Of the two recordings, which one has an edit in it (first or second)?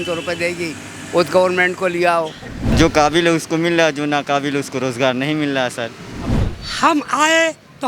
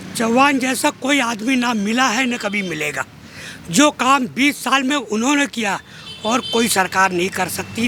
first